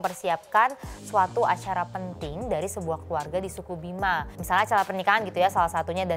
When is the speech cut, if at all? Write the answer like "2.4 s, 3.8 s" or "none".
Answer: none